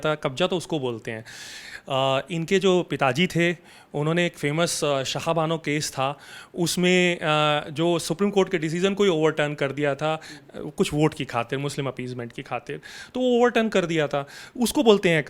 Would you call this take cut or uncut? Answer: uncut